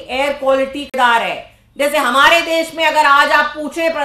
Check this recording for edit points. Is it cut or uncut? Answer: cut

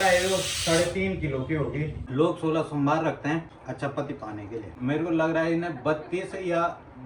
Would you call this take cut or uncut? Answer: cut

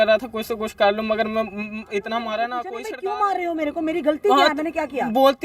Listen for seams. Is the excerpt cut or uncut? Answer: cut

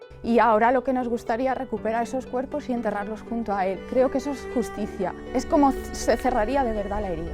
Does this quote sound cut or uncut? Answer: cut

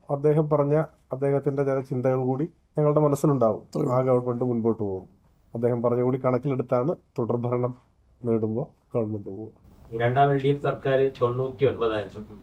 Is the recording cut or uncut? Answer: uncut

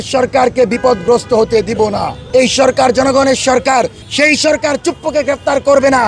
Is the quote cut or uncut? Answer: cut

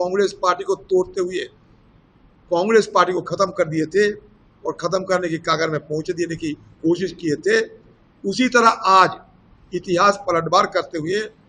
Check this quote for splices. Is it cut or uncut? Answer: uncut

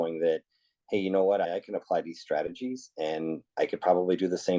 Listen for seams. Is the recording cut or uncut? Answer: cut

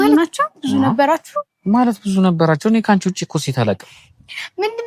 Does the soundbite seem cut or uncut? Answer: uncut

